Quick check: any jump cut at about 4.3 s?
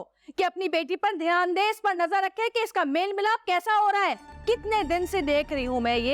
yes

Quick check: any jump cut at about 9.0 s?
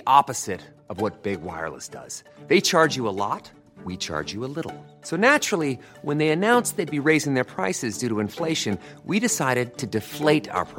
no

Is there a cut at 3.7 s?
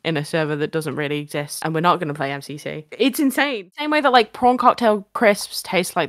yes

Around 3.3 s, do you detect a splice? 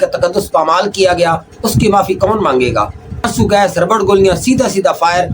yes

